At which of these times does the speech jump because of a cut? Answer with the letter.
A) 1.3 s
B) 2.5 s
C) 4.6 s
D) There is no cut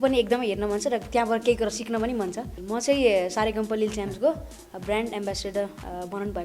B